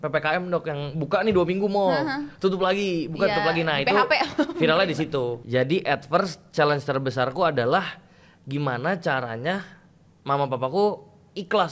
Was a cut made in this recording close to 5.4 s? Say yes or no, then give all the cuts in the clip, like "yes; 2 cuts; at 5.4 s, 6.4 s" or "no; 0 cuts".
yes; 1 cut; at 5.4 s